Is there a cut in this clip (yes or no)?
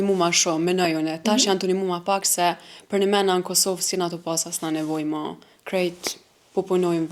no